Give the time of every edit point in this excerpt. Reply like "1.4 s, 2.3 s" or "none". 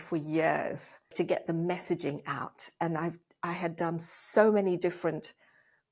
1.1 s